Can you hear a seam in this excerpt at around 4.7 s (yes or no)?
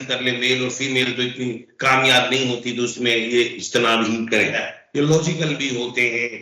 yes